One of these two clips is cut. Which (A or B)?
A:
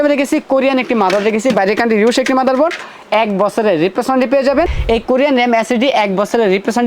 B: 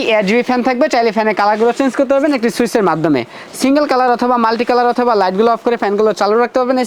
A